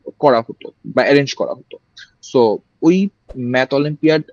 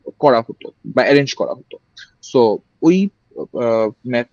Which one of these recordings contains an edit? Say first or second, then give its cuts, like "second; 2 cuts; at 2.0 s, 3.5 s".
first; 1 cut; at 3.3 s